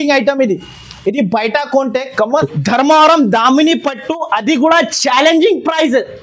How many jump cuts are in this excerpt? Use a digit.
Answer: 1